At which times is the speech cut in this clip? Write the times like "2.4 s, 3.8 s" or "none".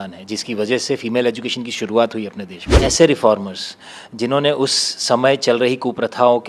2.8 s